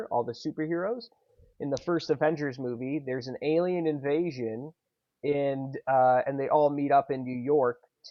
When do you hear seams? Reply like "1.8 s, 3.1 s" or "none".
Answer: none